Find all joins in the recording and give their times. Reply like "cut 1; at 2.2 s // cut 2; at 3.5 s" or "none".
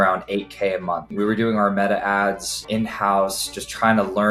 cut 1; at 1.1 s // cut 2; at 2.6 s